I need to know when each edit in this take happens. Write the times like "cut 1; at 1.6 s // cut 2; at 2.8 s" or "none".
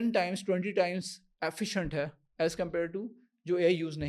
none